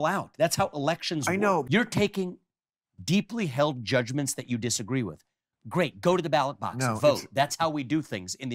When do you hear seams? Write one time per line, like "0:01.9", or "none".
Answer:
0:01.7